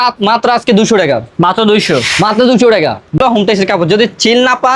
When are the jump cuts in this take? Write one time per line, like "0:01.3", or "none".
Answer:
0:03.2